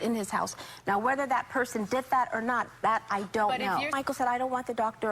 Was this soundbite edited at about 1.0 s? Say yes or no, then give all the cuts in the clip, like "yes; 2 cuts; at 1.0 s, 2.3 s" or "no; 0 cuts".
no; 1 cut; at 3.9 s